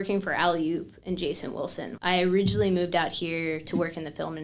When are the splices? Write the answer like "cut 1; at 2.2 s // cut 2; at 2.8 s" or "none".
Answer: cut 1; at 1.9 s